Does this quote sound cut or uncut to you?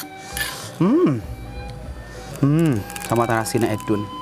uncut